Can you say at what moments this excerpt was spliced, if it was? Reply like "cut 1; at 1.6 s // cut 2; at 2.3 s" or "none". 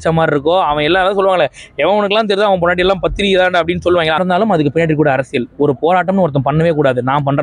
cut 1; at 4.2 s